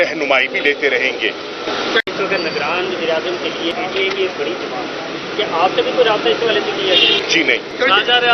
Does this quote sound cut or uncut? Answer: cut